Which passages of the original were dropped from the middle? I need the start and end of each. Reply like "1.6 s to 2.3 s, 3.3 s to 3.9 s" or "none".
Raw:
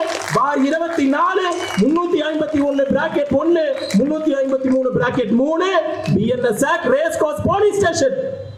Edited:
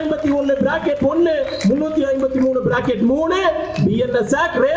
none